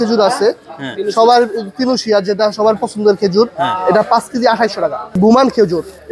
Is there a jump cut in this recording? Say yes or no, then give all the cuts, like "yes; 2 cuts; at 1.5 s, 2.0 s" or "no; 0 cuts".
yes; 1 cut; at 5.1 s